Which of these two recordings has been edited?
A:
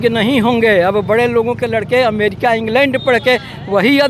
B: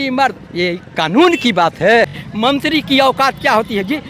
B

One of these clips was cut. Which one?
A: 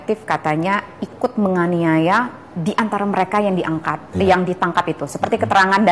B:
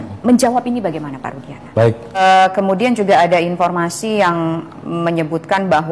B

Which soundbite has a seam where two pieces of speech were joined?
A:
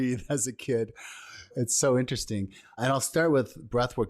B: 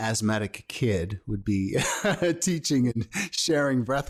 A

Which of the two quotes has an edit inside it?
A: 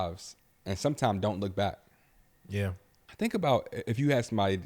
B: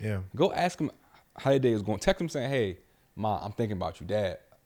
A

